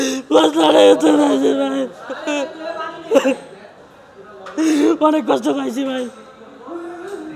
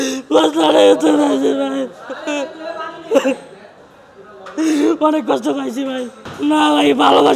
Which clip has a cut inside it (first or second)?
second